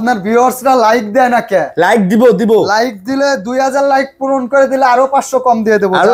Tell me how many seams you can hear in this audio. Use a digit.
0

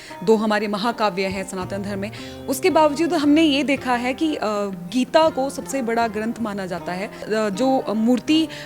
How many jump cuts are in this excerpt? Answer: 1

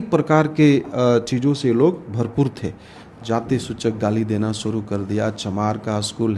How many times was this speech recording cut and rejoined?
1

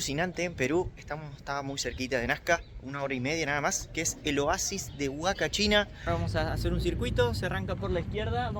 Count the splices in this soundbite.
1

